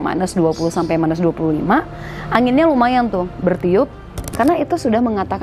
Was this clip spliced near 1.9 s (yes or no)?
no